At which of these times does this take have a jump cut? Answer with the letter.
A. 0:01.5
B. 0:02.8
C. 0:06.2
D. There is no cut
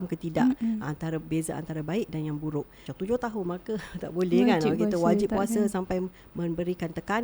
B